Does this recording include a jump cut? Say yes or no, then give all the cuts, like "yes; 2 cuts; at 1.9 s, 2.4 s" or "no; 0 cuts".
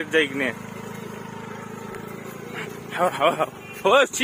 no; 0 cuts